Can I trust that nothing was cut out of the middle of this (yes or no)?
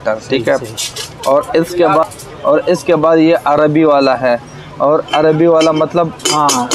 no